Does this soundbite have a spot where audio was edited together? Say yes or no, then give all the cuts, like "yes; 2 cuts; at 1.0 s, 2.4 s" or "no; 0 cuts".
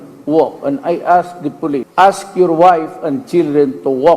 yes; 1 cut; at 1.9 s